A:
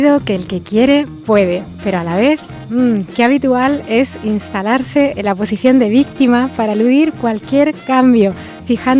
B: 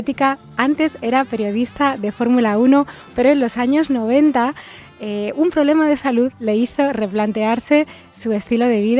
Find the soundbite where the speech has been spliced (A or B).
B